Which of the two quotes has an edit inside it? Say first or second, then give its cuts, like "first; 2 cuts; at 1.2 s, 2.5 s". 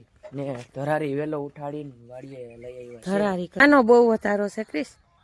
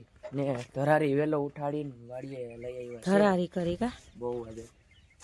first; 1 cut; at 3.6 s